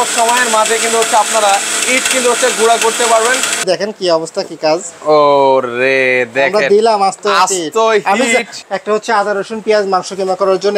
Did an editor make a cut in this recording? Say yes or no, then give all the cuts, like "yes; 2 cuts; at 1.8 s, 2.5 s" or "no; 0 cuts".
yes; 2 cuts; at 3.6 s, 8.5 s